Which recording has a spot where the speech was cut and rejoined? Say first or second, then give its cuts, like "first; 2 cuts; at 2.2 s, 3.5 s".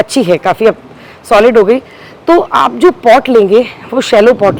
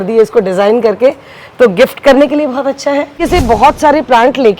second; 1 cut; at 3.2 s